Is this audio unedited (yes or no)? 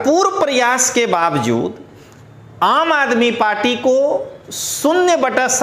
yes